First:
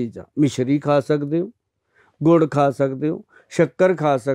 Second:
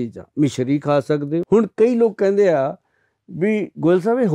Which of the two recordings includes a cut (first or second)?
second